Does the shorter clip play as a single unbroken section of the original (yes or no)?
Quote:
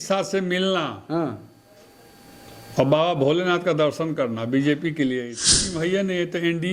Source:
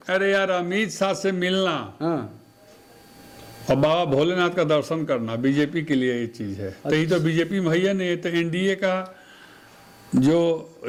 no